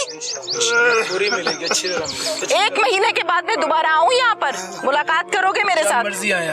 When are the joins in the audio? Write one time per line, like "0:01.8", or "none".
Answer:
0:02.4

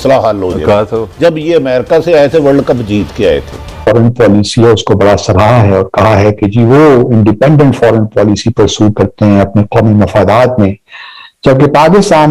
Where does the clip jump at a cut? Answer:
0:03.9

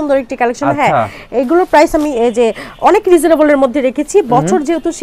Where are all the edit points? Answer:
none

